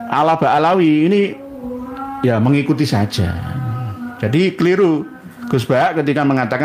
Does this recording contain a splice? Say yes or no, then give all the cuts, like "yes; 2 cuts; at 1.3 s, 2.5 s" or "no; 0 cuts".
no; 0 cuts